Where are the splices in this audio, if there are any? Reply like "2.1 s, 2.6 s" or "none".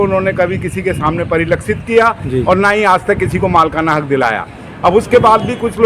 none